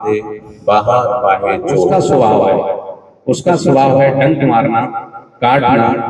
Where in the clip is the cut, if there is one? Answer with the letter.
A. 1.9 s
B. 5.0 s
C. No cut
A